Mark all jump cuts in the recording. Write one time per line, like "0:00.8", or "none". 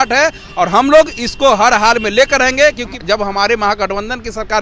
0:02.9